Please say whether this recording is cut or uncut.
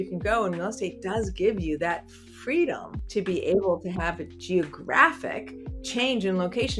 cut